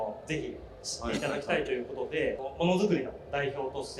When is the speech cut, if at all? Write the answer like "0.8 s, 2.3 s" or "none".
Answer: none